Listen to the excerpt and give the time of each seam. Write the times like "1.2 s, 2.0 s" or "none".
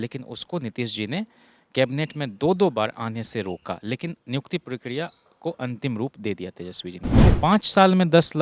7.2 s